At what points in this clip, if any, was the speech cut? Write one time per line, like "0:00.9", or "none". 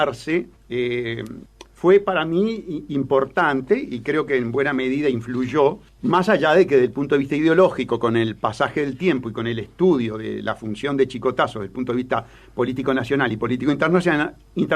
none